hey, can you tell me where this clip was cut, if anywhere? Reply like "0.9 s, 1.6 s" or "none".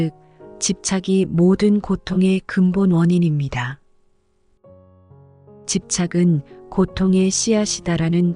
none

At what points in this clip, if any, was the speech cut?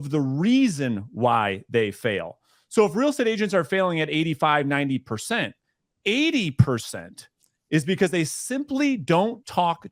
none

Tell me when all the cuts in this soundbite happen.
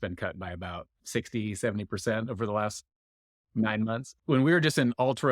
0.9 s, 4.1 s

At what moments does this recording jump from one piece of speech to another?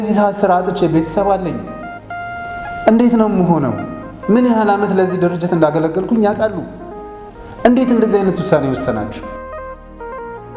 none

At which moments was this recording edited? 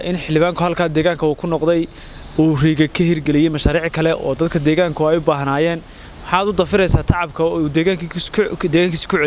none

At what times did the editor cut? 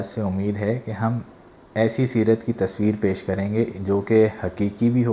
none

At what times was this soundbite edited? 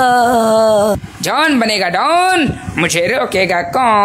1.1 s

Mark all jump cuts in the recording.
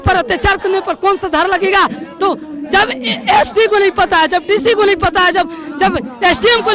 none

